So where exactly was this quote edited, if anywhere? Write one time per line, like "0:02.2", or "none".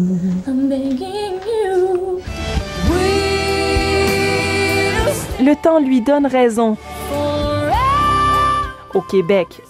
none